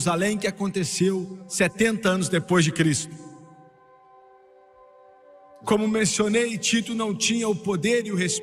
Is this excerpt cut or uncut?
uncut